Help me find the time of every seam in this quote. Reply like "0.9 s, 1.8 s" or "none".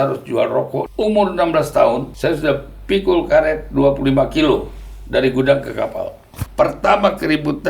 0.9 s, 2.1 s, 6.4 s